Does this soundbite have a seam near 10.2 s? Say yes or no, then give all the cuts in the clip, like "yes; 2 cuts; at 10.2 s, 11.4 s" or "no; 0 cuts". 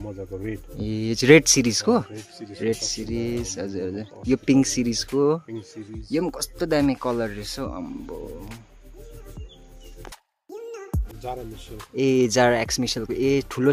yes; 1 cut; at 10.2 s